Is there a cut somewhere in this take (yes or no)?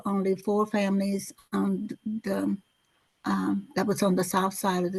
no